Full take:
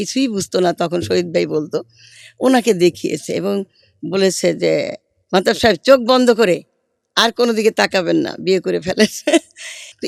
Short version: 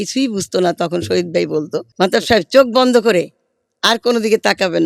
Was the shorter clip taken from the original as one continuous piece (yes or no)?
no